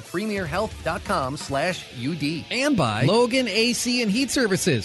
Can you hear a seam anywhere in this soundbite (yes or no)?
yes